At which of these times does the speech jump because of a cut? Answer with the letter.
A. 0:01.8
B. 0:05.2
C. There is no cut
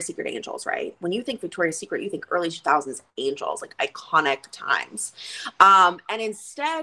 C